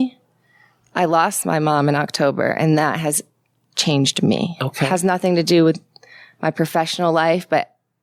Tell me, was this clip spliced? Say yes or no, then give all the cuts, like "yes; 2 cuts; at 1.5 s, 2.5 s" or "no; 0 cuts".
no; 0 cuts